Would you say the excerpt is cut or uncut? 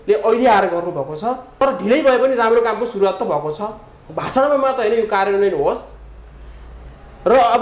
cut